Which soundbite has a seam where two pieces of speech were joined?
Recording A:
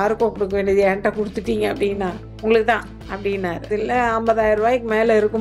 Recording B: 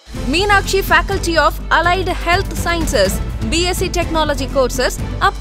A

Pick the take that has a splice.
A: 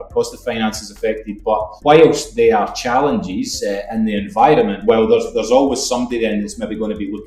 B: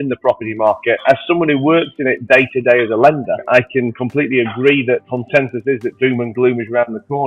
B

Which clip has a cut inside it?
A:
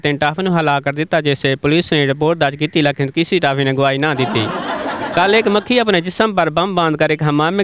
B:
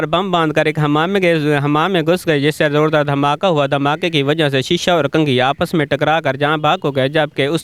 A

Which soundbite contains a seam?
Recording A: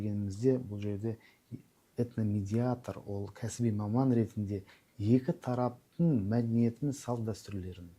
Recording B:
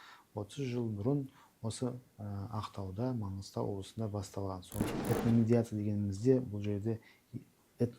B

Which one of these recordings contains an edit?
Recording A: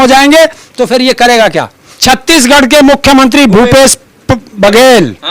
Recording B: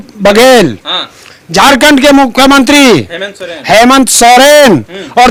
A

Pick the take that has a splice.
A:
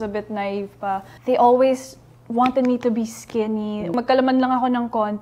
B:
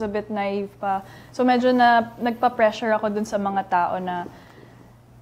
A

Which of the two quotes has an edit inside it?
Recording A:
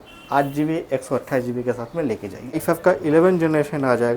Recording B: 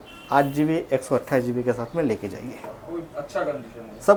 A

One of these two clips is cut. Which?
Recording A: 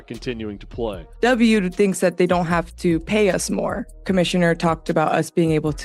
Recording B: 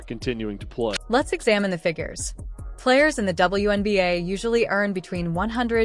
A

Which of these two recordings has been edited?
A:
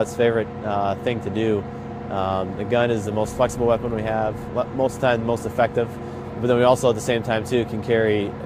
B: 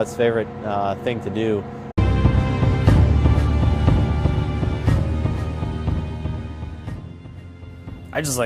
A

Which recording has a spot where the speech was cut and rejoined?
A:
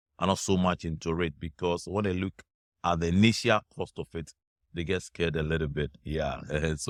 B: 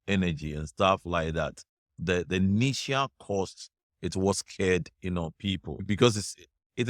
B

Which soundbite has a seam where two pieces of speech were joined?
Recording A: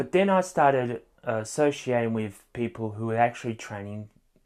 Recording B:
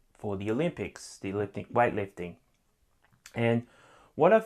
B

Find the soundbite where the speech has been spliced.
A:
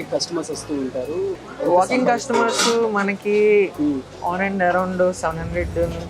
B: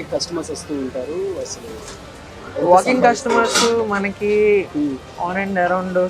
A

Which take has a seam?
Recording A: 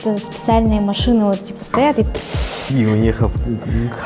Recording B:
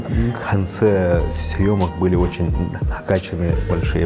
A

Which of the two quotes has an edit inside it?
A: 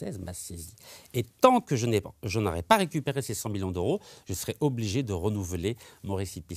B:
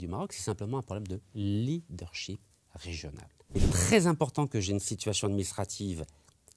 B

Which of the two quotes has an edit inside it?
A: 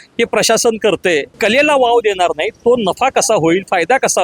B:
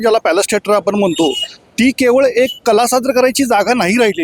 A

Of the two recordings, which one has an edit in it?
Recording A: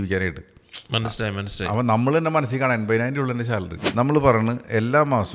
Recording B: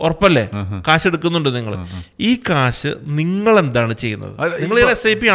A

